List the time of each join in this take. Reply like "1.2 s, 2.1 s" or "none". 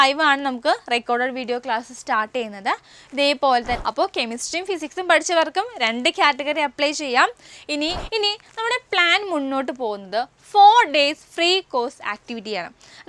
3.8 s, 8.0 s